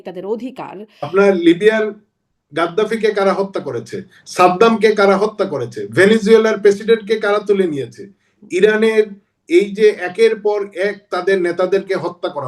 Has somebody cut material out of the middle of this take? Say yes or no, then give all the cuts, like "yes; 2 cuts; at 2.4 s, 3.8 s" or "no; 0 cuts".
yes; 1 cut; at 1.1 s